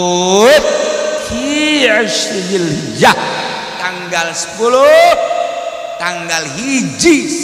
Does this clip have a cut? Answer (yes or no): no